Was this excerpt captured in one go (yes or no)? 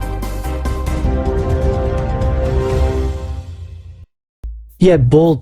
no